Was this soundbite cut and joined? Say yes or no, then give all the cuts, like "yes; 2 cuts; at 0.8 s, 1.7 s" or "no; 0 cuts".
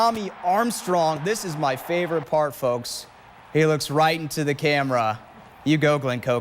yes; 1 cut; at 1.2 s